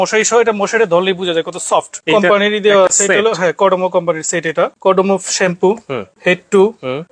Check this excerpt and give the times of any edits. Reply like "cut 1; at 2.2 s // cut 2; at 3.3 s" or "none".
cut 1; at 1.9 s // cut 2; at 4.7 s